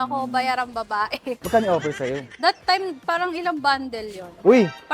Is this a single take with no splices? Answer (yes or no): no